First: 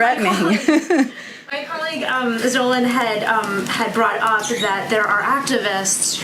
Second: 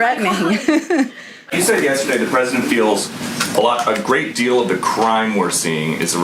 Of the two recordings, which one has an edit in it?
second; 1 cut; at 1.5 s

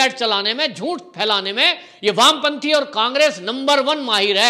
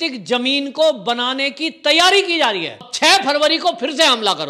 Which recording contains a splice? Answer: second; 1 cut; at 2.8 s

